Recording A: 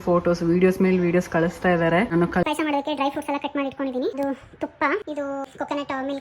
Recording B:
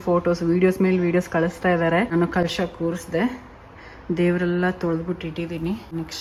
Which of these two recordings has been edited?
A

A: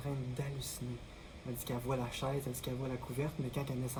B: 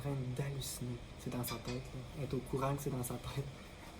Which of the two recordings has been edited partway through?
B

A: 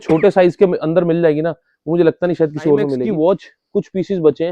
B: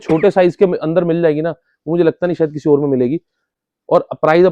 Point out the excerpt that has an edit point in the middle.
A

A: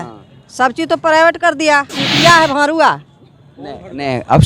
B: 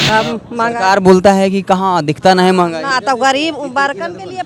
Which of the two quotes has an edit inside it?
A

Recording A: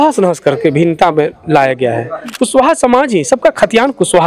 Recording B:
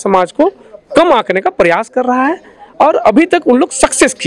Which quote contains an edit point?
A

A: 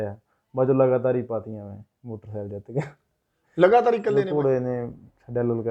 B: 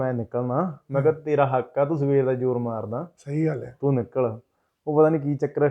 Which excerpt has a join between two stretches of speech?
A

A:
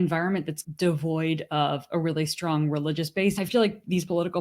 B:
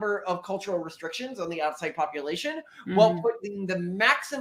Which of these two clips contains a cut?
A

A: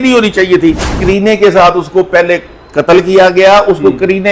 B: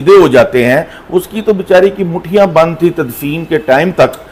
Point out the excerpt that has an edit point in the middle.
A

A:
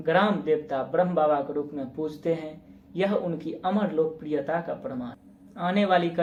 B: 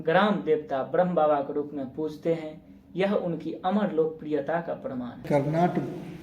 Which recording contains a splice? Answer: B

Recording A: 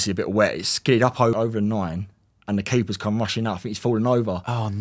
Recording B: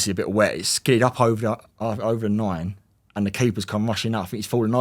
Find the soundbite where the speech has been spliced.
A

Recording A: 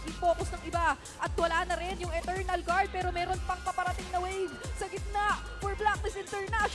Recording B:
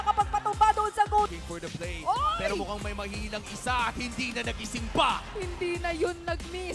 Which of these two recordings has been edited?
B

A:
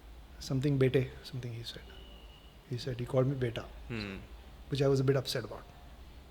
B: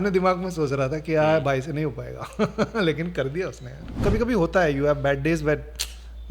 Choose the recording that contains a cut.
B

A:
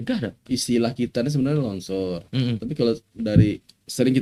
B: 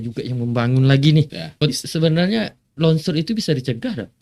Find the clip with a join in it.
B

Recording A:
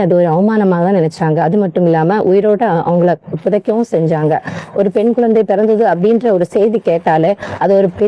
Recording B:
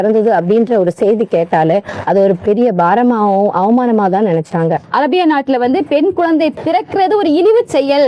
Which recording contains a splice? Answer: B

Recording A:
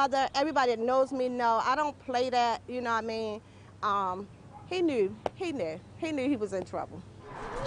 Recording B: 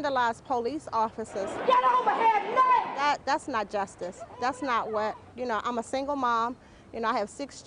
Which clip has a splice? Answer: B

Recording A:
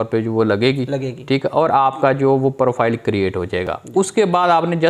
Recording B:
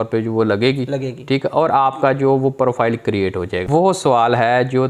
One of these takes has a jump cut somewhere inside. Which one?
B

